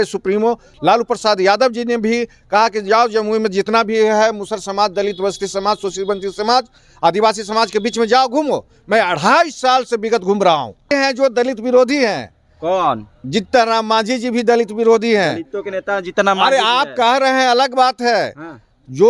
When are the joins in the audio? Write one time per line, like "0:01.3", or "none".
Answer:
0:10.9